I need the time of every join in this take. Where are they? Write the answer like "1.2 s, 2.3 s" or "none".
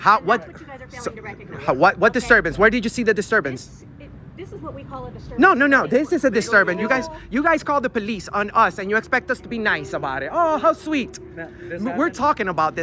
none